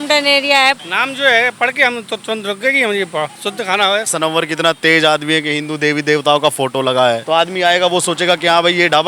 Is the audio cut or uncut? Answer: cut